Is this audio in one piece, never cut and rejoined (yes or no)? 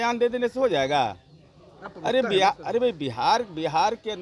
yes